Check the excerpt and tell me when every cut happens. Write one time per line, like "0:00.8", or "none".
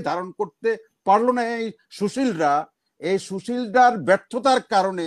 none